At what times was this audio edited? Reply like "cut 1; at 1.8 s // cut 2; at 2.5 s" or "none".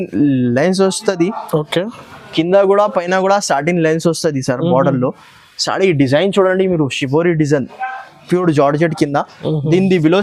none